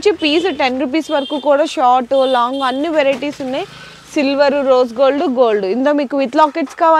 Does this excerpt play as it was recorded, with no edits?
yes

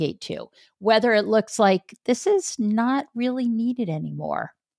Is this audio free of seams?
yes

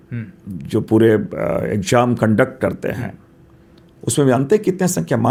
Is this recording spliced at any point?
no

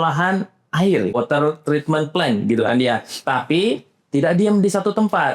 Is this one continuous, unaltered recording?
no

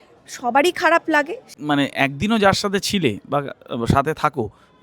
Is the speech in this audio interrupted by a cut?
yes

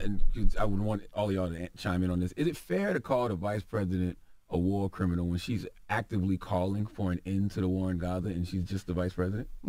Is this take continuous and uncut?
yes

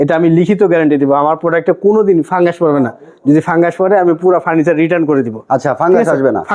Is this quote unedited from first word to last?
yes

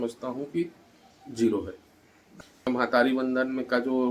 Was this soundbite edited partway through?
yes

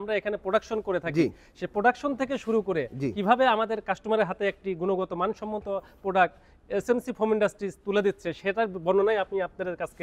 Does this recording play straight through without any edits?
yes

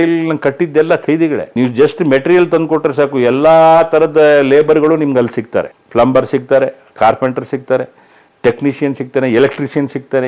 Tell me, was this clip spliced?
no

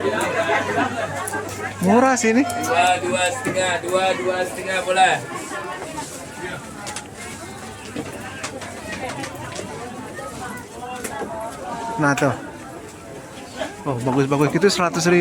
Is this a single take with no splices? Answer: yes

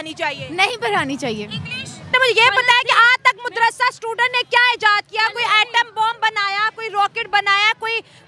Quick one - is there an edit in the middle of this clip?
yes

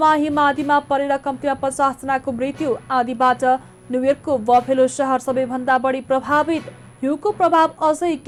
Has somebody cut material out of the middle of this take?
no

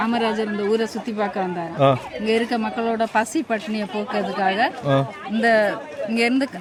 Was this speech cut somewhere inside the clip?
no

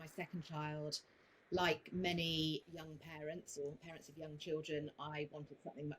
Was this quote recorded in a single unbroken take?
no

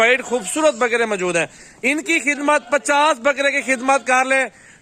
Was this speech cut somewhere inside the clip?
no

